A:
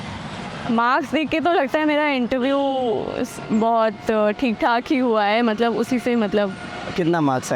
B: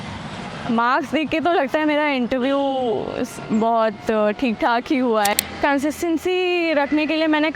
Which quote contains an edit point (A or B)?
B